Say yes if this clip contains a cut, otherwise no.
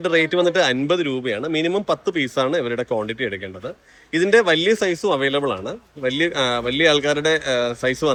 no